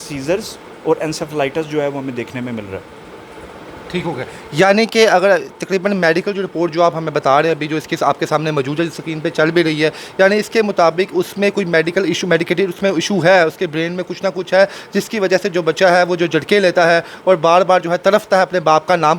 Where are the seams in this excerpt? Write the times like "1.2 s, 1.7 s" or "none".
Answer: none